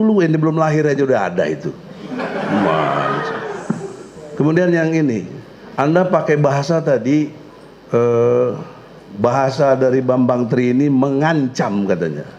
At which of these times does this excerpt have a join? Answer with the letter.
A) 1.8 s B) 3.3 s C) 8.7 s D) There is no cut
D